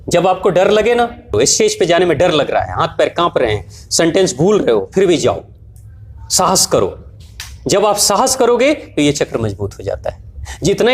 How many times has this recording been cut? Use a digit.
1